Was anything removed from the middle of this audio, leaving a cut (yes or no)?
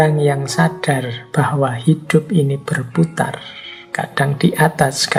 no